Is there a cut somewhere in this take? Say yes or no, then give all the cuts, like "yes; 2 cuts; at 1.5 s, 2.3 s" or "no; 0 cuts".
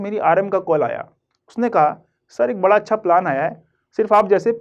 no; 0 cuts